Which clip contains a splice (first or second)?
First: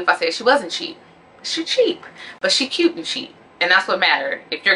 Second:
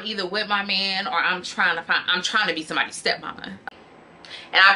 second